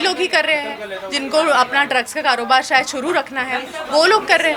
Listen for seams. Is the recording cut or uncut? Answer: uncut